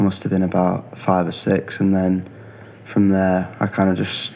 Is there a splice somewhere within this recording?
no; 0 cuts

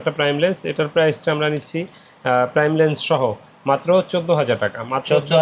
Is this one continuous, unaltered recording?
yes; 0 cuts

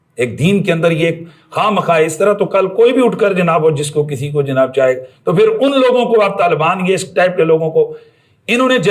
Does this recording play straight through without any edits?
yes; 0 cuts

